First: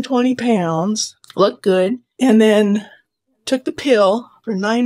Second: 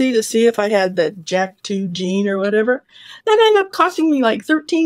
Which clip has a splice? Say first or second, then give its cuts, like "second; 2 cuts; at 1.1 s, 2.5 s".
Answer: first; 2 cuts; at 1.1 s, 2.0 s